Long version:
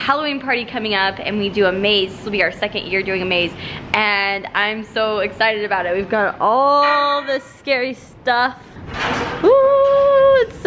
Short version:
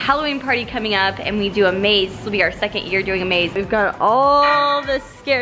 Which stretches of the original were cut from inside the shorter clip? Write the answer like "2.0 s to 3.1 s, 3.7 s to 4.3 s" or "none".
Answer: 3.6 s to 6.0 s